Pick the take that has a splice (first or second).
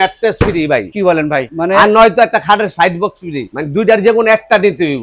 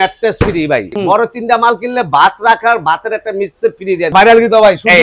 second